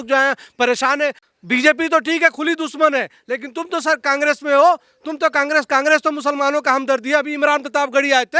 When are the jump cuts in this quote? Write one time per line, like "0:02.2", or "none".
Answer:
0:01.2